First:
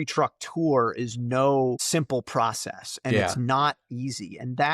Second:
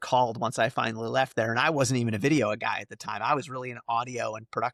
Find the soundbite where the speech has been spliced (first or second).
first